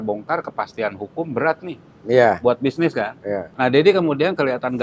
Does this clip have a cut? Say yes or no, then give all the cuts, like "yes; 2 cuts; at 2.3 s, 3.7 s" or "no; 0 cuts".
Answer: yes; 1 cut; at 3.5 s